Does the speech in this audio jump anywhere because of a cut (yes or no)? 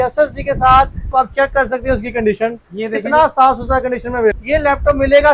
yes